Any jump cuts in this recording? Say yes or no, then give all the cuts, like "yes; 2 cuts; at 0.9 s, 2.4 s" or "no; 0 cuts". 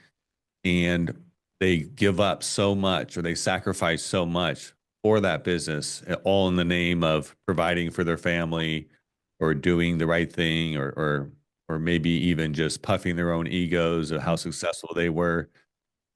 no; 0 cuts